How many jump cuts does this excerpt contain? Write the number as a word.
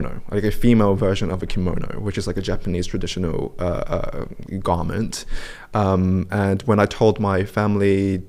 zero